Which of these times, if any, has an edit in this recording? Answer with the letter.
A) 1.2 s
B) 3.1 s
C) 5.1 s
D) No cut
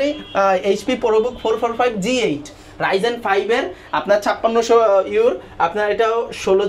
D